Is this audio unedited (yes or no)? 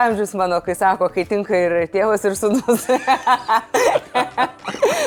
yes